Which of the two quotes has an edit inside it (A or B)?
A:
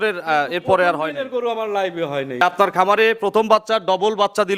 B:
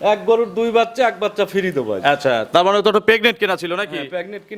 A